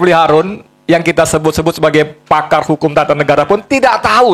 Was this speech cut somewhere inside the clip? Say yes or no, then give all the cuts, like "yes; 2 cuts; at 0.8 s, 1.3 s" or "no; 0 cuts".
no; 0 cuts